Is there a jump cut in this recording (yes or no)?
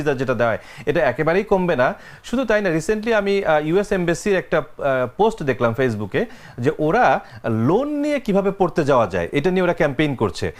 no